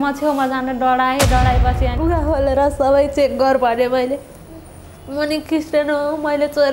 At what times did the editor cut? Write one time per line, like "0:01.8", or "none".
0:01.9